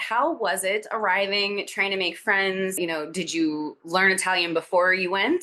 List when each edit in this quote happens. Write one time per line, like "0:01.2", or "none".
none